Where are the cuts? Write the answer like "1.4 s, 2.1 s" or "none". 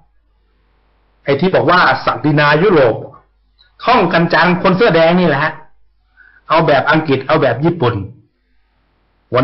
6.2 s